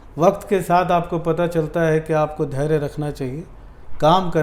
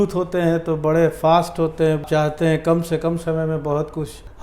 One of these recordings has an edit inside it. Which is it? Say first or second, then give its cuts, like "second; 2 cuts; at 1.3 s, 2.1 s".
second; 1 cut; at 2.0 s